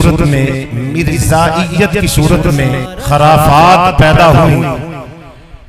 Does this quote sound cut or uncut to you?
cut